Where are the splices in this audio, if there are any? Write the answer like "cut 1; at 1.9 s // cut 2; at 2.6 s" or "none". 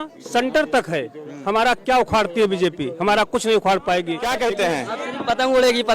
cut 1; at 4.2 s